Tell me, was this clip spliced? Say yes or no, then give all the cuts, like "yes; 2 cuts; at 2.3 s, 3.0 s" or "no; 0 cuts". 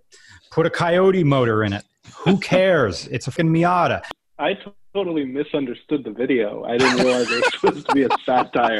yes; 2 cuts; at 3.3 s, 4.1 s